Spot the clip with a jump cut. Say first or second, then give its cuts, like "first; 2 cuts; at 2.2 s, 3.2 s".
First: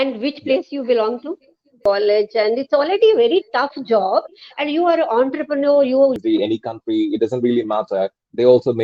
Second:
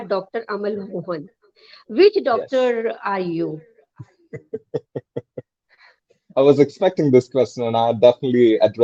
first; 2 cuts; at 1.8 s, 6.2 s